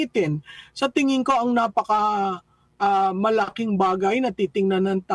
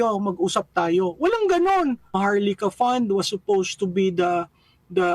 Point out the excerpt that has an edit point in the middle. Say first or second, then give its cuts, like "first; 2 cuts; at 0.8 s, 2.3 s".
second; 1 cut; at 2.2 s